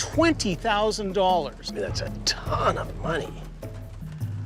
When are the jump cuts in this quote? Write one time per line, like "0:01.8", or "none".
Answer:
none